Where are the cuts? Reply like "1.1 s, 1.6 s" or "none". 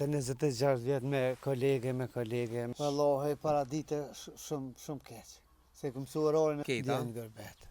2.7 s, 6.6 s